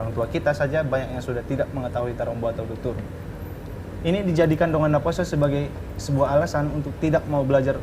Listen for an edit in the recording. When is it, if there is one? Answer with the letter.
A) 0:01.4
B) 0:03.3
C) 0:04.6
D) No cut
D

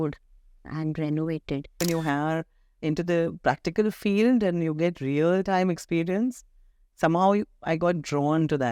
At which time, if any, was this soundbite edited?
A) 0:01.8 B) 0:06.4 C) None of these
A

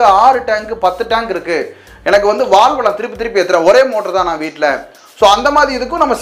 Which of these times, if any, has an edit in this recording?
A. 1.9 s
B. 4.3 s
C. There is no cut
C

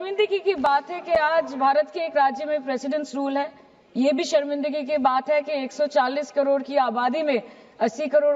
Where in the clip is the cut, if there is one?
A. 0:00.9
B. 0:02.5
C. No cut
C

